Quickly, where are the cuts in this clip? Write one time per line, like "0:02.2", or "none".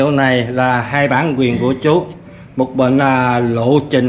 none